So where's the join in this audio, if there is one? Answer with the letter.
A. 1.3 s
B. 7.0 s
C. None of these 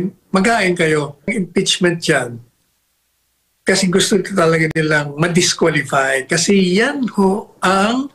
A